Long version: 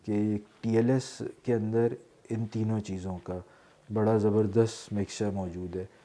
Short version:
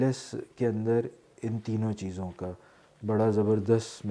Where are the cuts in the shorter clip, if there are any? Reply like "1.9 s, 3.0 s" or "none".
none